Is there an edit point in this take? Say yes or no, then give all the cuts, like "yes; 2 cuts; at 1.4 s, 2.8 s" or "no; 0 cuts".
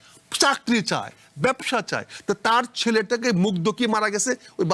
no; 0 cuts